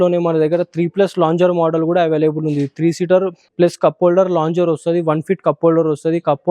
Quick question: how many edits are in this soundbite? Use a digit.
1